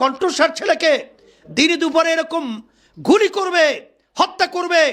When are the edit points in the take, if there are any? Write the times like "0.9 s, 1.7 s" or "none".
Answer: none